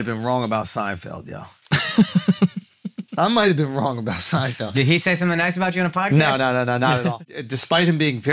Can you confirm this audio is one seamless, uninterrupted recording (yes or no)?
no